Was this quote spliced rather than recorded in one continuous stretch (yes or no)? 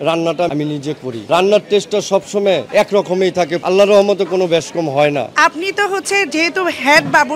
no